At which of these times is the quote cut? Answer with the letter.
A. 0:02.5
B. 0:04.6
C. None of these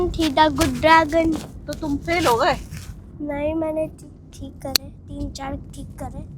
C